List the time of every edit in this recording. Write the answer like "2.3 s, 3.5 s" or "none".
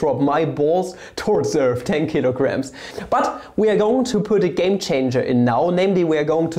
2.9 s